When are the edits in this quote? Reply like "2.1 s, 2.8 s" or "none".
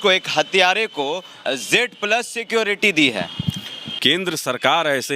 4.0 s